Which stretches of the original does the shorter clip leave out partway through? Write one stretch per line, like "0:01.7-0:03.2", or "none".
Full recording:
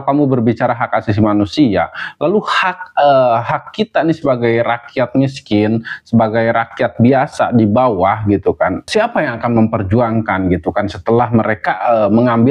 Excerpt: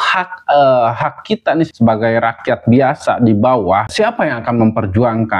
0:04.2-0:06.0
0:08.2-0:08.8